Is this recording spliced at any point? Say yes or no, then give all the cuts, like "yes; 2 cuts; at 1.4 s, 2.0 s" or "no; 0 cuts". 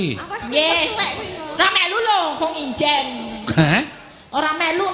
no; 0 cuts